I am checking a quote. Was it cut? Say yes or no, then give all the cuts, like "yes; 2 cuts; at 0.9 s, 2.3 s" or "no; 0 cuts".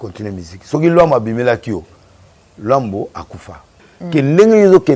yes; 1 cut; at 3.9 s